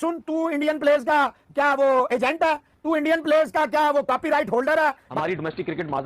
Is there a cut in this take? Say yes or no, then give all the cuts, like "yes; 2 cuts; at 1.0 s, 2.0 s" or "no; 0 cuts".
yes; 1 cut; at 5.1 s